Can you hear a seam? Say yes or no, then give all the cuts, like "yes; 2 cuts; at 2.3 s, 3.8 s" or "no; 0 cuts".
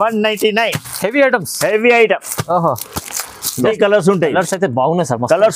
yes; 1 cut; at 3.7 s